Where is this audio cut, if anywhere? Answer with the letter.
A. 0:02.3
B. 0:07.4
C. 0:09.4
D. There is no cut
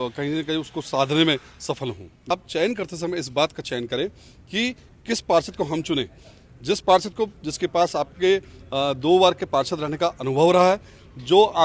A